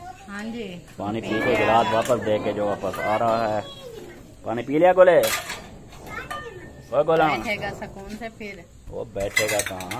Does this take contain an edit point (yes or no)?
no